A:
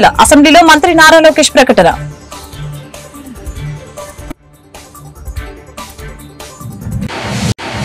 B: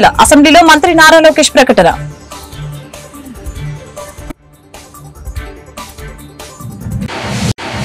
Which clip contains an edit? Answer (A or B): A